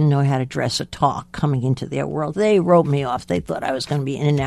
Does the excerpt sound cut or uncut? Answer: uncut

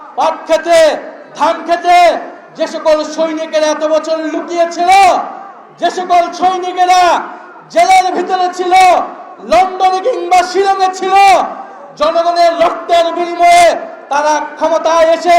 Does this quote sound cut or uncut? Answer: uncut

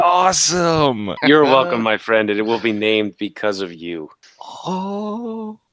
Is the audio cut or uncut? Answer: cut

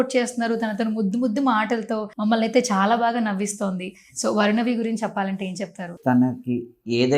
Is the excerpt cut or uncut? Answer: cut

